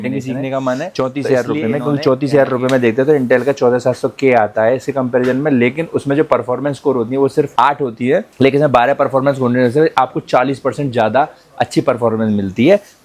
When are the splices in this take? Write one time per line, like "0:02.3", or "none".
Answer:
0:00.9